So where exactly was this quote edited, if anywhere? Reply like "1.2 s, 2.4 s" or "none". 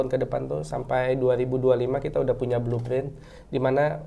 none